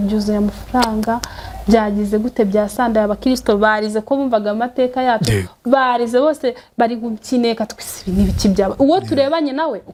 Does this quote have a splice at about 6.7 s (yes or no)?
no